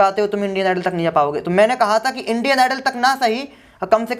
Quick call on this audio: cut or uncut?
uncut